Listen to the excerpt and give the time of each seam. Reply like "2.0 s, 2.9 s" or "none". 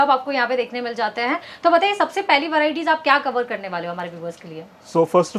none